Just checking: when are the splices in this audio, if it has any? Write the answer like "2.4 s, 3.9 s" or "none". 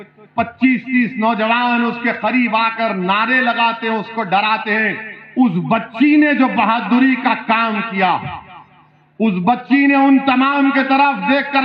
none